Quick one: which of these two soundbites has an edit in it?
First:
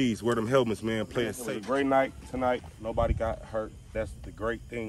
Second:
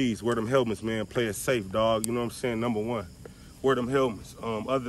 first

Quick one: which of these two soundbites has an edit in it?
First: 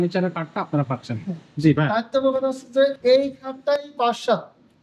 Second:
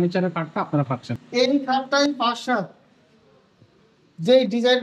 second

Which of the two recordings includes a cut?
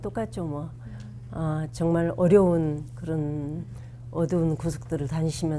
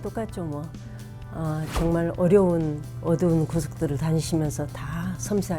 second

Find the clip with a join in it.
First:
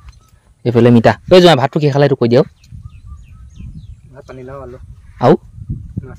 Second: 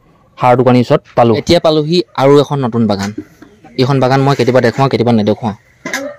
second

